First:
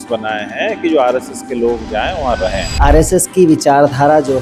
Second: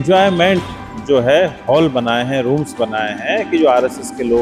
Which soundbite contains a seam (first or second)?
first